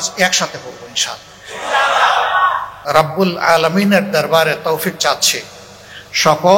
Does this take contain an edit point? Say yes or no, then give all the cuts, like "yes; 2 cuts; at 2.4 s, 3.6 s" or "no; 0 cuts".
yes; 1 cut; at 2.7 s